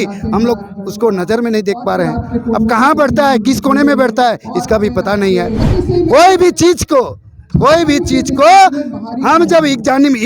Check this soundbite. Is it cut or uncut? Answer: cut